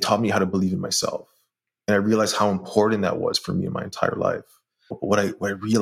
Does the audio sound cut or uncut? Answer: cut